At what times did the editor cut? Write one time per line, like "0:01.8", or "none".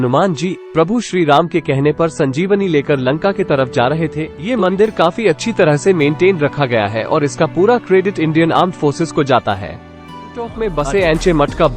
0:04.3
0:10.4